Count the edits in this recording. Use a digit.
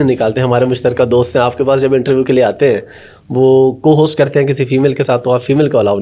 0